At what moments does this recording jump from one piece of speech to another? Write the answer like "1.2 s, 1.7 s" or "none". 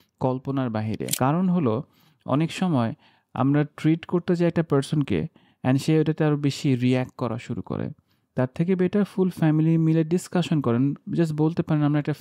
1.1 s